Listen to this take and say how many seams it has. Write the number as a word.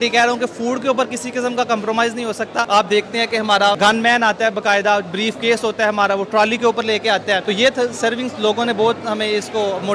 one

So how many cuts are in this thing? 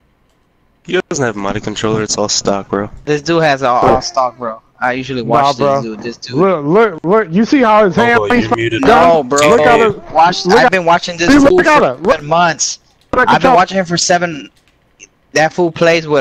one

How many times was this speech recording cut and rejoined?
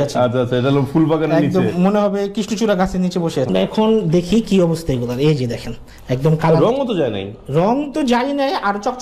one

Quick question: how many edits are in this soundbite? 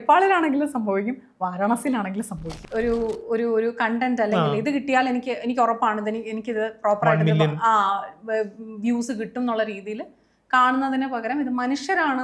one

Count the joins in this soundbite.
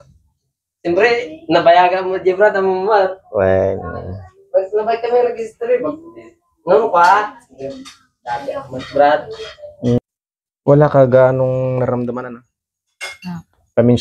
one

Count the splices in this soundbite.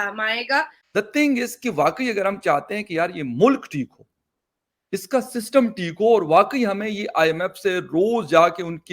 one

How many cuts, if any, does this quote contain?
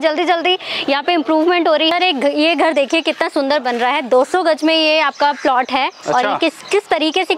one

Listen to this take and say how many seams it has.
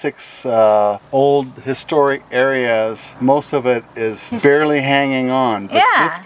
three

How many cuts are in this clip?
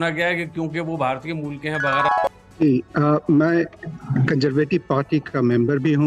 zero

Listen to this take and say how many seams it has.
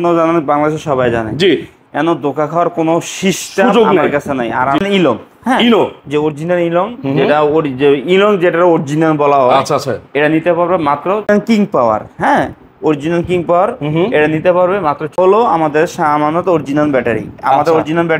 three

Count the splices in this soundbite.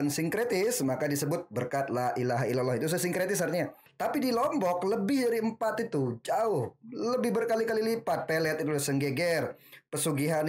one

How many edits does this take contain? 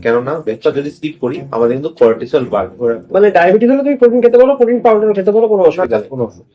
one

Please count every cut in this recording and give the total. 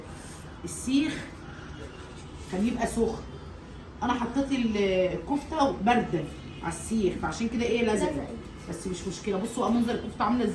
zero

